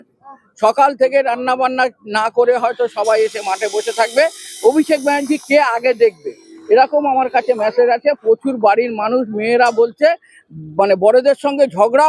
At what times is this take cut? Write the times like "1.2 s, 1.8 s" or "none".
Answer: none